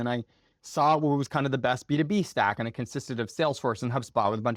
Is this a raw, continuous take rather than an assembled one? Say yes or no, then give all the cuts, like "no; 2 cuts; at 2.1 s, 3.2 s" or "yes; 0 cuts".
yes; 0 cuts